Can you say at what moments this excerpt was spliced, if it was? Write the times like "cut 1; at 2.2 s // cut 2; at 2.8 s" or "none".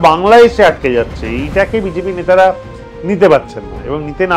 none